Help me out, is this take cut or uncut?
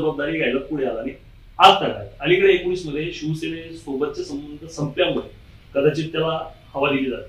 uncut